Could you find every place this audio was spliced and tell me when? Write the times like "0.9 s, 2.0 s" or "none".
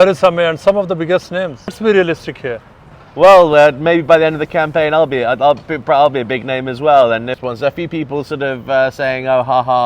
1.8 s, 7.3 s